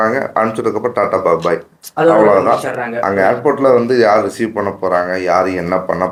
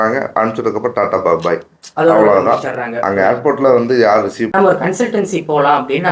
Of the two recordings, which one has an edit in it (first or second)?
second